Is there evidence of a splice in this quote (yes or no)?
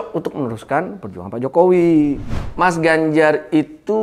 yes